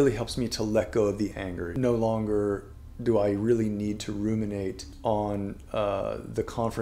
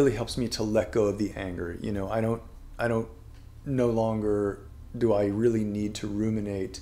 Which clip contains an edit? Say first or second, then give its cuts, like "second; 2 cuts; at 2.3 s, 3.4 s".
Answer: first; 2 cuts; at 1.7 s, 4.9 s